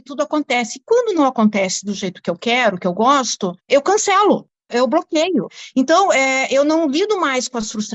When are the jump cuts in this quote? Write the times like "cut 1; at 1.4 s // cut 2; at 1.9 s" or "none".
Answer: cut 1; at 5.6 s